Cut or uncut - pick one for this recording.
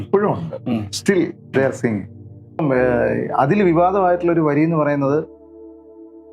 cut